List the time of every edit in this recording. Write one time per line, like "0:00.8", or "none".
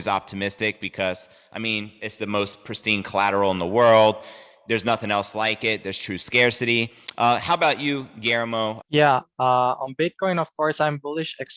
0:08.8

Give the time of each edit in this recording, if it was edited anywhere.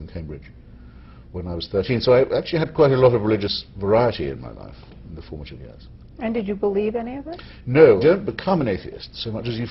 0:08.0

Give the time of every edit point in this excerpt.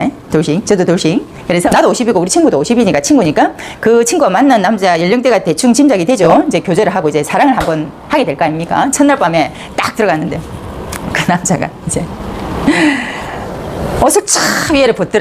0:01.7
0:06.2

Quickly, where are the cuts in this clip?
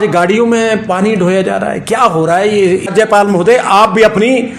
0:02.9

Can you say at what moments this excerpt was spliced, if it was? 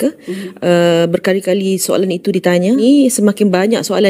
0:02.8

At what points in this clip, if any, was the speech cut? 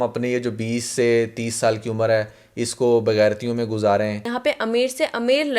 0:04.3

